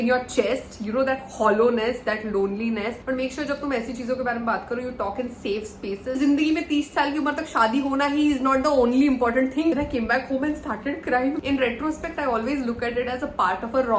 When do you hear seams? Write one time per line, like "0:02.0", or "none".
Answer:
0:03.0
0:06.2
0:09.7
0:11.4